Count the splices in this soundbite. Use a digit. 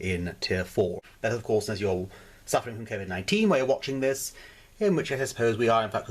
1